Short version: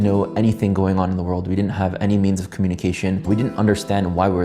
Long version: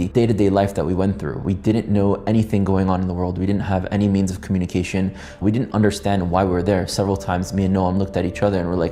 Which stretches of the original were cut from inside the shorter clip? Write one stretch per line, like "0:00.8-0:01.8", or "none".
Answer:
0:05.1-0:05.4

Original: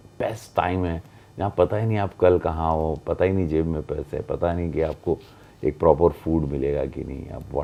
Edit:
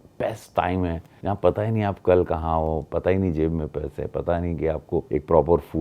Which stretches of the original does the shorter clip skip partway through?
0:01.1-0:01.2
0:05.2-0:05.6

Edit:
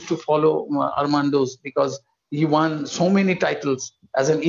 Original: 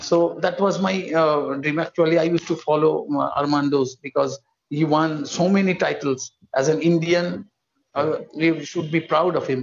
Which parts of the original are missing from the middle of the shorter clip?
none

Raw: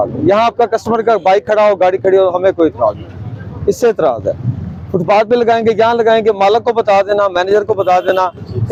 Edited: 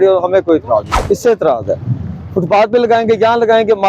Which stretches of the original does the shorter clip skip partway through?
0:03.0-0:03.5

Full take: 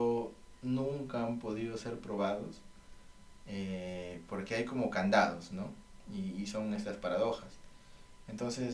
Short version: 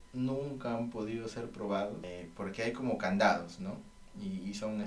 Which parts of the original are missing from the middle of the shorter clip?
0:02.6-0:04.0

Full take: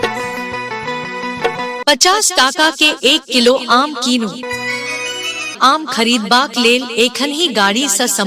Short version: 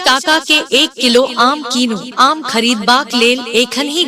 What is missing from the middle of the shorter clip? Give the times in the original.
0:04.4-0:05.5

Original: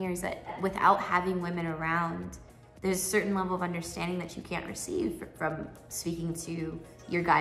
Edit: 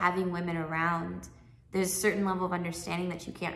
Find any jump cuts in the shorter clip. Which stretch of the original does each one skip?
none

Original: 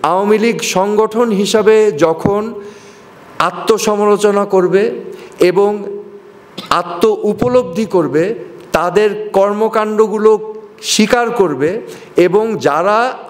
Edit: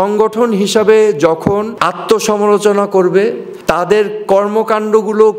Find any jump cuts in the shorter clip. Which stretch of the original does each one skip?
0:02.5-0:03.3
0:05.1-0:08.5

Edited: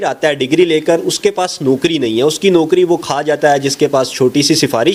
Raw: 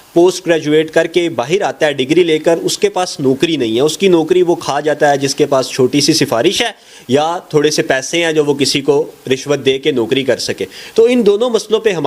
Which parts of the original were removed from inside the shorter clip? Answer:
none

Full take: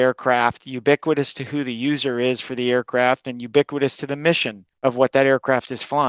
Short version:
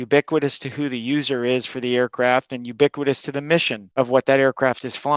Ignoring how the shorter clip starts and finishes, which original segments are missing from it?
0:04.5-0:04.7

